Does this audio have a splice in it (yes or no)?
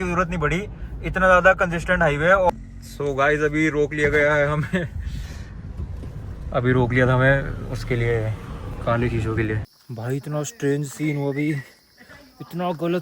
yes